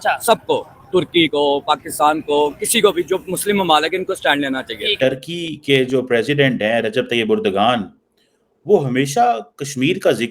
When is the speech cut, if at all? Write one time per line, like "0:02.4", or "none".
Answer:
0:04.8